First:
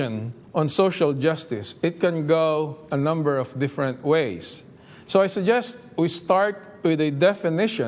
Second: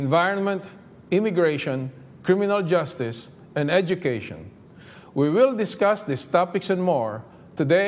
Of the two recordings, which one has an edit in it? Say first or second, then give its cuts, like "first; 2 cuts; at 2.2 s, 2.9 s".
second; 1 cut; at 5.8 s